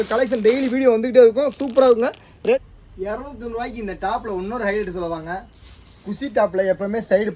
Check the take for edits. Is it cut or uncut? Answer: cut